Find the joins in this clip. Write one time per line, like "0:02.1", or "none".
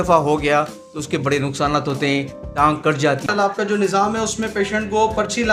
0:03.3